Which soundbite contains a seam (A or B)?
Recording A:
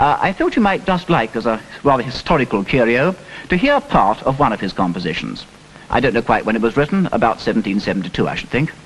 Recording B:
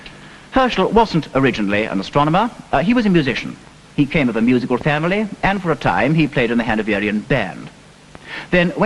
A